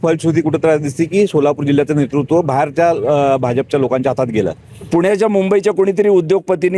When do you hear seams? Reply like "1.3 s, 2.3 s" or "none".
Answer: 4.9 s